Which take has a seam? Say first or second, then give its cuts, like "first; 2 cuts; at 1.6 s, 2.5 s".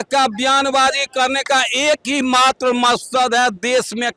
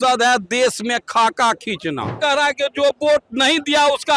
second; 1 cut; at 2.2 s